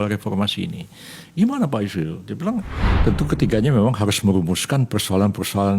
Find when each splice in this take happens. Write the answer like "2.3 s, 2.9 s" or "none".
2.8 s